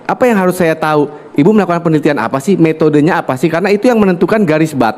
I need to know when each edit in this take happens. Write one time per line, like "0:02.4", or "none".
none